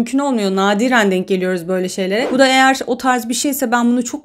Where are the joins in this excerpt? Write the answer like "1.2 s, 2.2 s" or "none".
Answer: 2.3 s

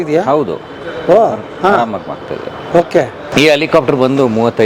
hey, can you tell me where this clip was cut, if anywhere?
3.2 s

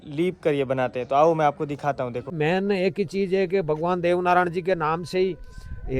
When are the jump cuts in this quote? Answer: 2.2 s

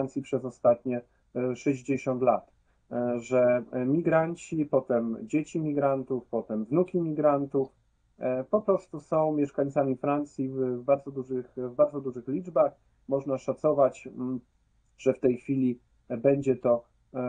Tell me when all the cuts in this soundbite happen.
none

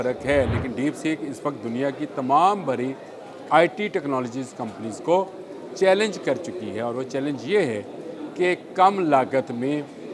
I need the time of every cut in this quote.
none

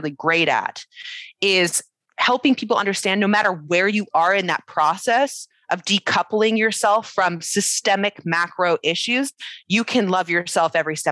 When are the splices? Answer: none

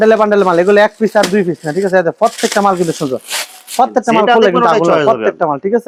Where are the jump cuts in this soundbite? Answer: none

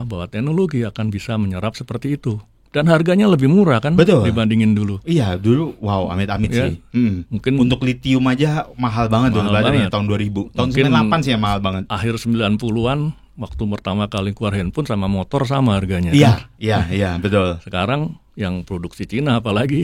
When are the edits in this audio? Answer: none

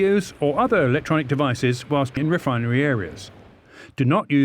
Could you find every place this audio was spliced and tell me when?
2.1 s

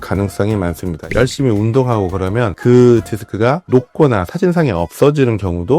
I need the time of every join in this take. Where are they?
1.1 s

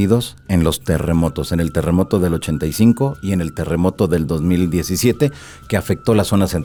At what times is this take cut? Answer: none

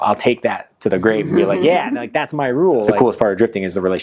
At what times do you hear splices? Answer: 2.8 s

